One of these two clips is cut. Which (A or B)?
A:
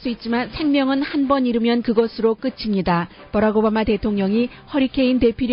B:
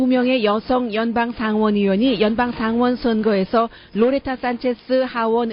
A